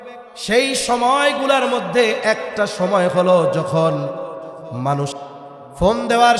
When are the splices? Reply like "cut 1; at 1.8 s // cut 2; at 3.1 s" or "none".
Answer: cut 1; at 5.1 s